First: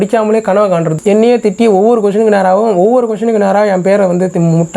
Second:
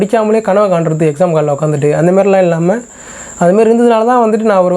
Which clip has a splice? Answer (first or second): first